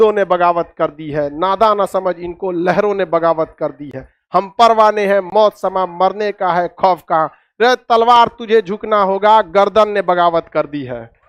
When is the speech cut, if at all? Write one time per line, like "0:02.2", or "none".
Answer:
none